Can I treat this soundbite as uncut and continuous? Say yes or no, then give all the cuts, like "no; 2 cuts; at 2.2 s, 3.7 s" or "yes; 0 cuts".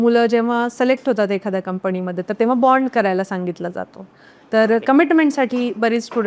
yes; 0 cuts